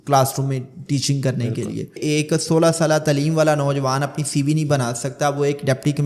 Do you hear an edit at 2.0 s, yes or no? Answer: yes